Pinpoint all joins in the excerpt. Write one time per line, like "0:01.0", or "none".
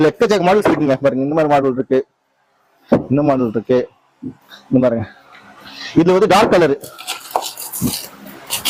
none